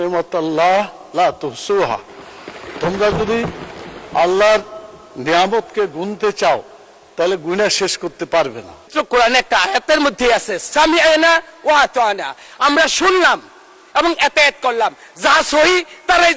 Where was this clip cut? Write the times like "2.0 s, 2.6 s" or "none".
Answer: 8.9 s